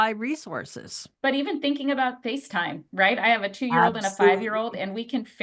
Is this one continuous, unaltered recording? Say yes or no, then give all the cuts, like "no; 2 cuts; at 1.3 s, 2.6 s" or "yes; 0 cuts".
no; 1 cut; at 1.0 s